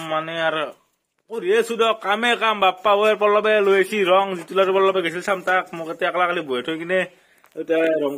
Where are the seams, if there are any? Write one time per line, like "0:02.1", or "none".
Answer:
none